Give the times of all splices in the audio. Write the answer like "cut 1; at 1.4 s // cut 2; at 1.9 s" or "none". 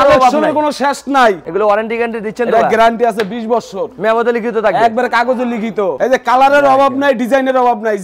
cut 1; at 1.4 s // cut 2; at 6.0 s

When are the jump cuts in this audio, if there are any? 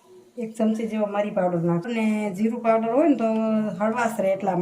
cut 1; at 1.9 s

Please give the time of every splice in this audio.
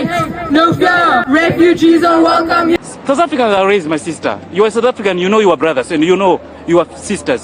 cut 1; at 2.8 s

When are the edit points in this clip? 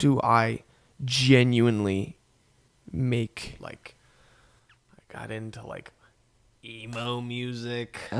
cut 1; at 3.6 s

